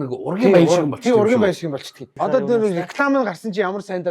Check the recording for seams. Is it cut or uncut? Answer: cut